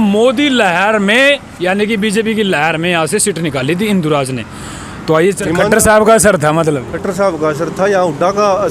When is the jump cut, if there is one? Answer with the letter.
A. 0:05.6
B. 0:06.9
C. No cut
A